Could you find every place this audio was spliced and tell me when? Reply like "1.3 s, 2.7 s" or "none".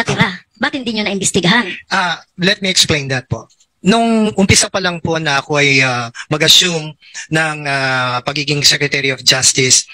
none

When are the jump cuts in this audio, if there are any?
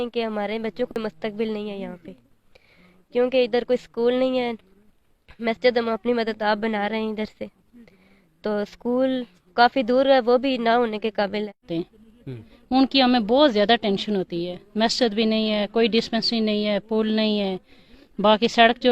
0.9 s, 11.7 s

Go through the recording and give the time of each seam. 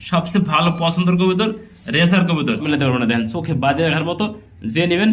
2.6 s

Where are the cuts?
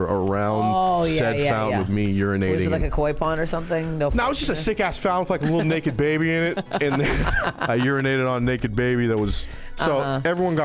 none

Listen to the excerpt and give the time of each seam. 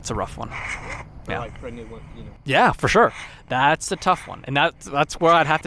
none

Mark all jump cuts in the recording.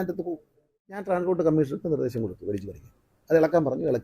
1.0 s

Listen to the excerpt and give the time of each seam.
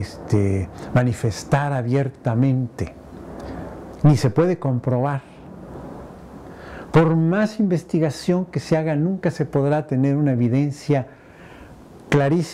none

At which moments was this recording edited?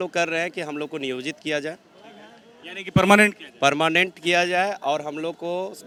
none

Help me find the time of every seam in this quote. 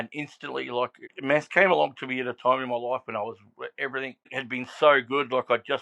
1.0 s, 4.3 s

